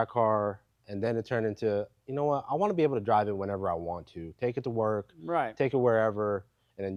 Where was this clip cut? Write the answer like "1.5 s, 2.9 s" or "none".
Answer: none